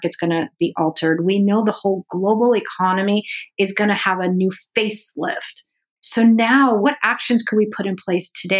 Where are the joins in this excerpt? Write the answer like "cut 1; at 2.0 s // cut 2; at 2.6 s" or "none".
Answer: cut 1; at 5.9 s // cut 2; at 6.8 s